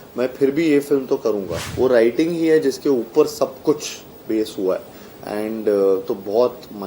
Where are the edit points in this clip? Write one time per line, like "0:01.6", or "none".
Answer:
0:01.6